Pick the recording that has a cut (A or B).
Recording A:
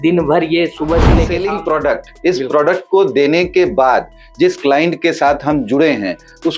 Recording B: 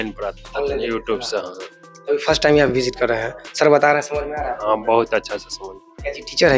A